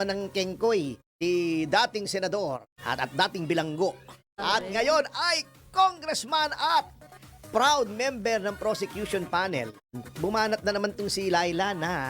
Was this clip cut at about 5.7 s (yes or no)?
no